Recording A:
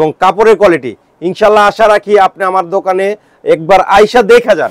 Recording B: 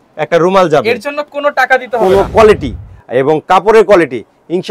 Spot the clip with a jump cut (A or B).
B